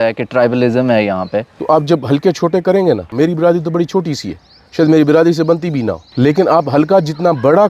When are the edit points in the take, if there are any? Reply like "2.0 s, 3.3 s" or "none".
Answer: 1.5 s, 3.1 s, 6.0 s